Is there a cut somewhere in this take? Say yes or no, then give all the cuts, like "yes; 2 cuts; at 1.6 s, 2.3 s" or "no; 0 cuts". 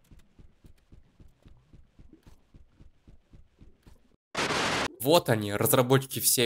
yes; 1 cut; at 4.9 s